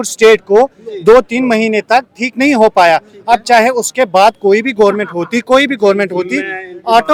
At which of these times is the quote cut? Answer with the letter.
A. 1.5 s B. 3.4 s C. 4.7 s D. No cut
D